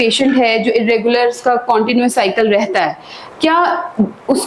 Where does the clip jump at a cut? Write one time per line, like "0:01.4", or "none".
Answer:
none